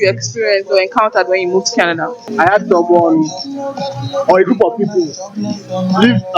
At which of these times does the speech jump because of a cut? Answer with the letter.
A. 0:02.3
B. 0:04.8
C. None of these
A